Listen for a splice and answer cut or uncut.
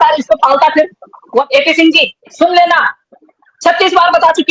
cut